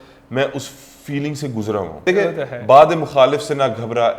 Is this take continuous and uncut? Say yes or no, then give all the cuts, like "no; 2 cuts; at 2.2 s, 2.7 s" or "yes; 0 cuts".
no; 1 cut; at 2.0 s